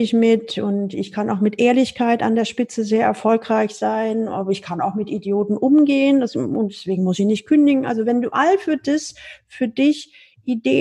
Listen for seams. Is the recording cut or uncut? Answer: uncut